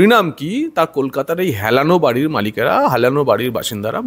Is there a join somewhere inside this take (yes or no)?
no